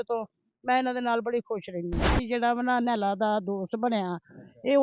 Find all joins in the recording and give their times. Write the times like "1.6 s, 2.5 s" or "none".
2.2 s